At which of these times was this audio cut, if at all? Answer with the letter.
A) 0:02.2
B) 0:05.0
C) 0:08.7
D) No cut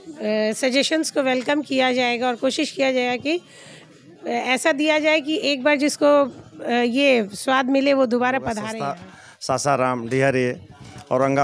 C